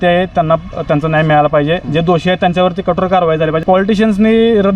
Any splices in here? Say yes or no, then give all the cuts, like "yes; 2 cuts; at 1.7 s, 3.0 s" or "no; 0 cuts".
yes; 1 cut; at 3.6 s